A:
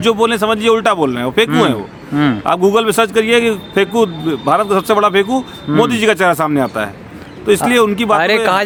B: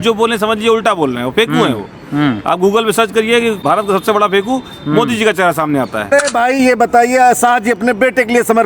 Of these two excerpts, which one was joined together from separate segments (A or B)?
B